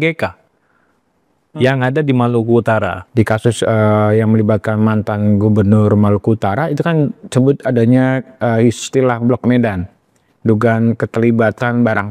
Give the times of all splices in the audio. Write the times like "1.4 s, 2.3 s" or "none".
3.0 s